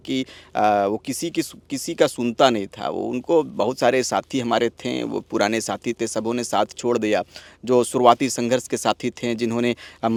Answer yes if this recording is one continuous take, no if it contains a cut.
yes